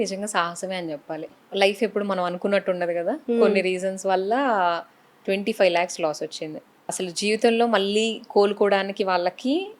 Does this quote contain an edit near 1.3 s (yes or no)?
yes